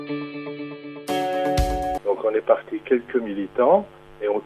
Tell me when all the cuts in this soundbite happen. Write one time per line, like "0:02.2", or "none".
0:02.0